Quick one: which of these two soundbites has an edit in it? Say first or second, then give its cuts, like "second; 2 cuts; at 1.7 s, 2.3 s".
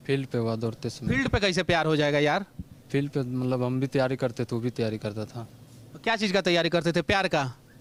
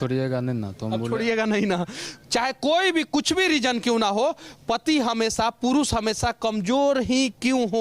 second; 1 cut; at 2.0 s